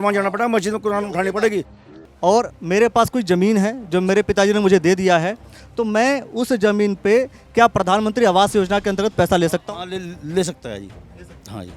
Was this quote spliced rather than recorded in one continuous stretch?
yes; 1 cut; at 1.8 s

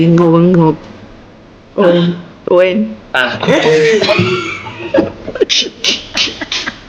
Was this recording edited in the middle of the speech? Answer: no; 0 cuts

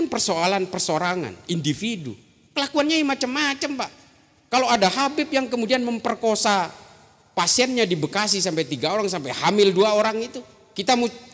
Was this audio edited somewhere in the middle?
no; 0 cuts

